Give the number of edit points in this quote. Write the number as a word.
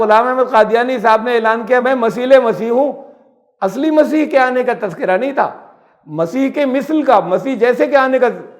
one